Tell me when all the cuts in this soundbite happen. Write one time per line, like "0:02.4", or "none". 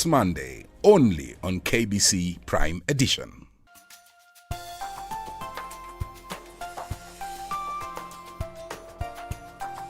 0:03.6